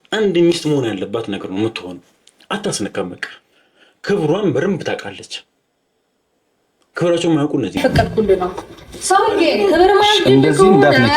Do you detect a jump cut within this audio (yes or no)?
yes